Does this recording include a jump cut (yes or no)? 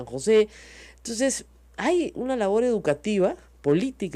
no